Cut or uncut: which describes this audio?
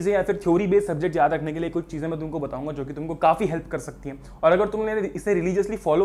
uncut